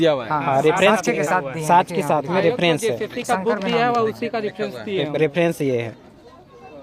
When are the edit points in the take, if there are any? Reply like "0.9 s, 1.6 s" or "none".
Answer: none